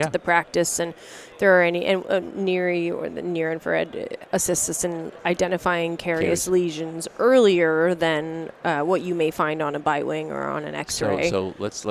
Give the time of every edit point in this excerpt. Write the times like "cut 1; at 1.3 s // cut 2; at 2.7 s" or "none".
none